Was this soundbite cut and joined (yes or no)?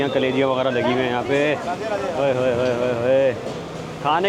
no